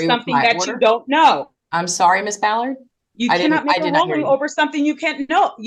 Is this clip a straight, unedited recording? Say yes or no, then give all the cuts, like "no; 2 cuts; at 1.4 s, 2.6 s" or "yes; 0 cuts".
yes; 0 cuts